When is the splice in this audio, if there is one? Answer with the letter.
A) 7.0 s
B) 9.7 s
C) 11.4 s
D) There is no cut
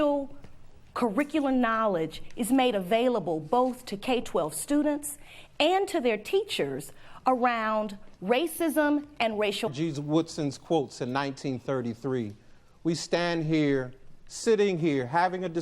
B